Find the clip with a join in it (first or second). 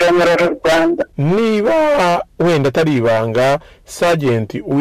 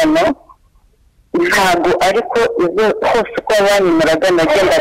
first